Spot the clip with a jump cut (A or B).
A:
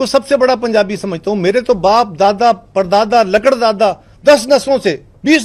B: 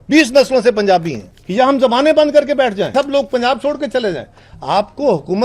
B